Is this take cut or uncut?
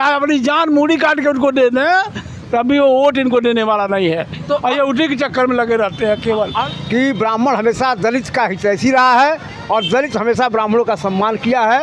cut